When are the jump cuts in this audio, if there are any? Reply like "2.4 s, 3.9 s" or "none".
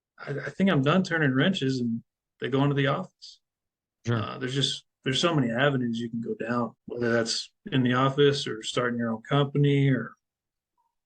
6.8 s